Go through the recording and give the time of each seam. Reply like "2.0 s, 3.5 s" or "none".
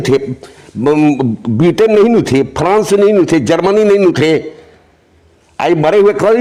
none